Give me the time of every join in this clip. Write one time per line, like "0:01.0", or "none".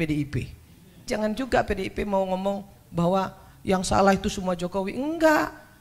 0:01.0